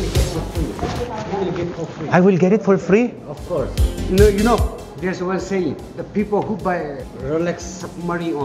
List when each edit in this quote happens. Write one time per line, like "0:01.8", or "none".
0:04.1